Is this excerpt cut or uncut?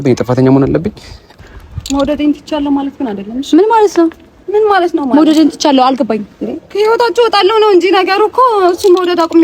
cut